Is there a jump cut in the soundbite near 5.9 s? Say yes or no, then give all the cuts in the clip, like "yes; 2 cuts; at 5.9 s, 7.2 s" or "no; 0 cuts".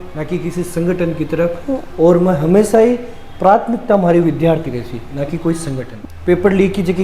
yes; 1 cut; at 5.9 s